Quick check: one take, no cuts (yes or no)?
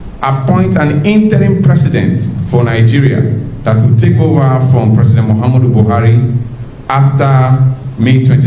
yes